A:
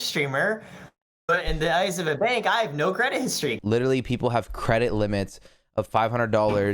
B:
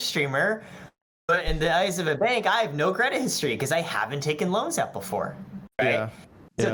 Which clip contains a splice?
A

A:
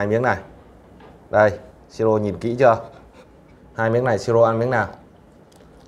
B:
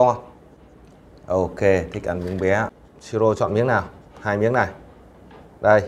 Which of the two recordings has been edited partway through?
B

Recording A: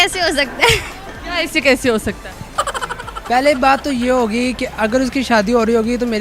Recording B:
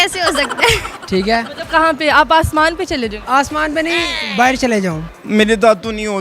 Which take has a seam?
B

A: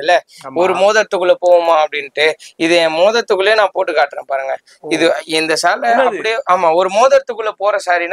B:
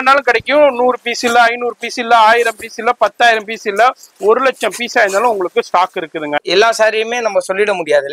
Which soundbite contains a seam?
B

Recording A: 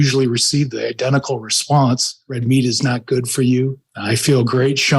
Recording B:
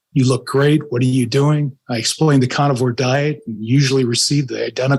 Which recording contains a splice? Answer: A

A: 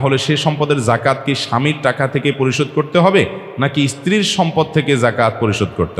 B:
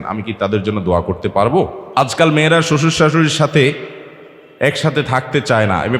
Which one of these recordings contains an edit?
B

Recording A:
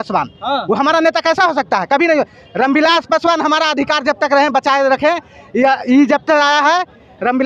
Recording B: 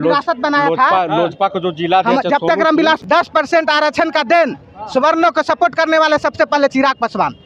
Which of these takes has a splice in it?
B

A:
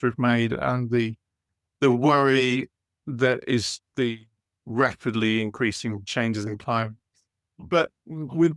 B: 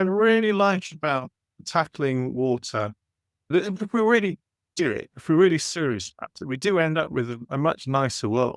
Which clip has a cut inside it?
B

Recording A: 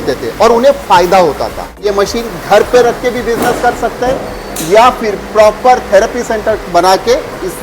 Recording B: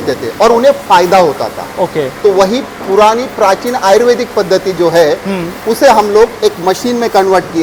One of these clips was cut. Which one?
A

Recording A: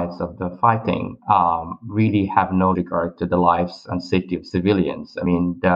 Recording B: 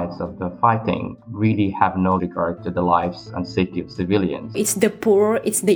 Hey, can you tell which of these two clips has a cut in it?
B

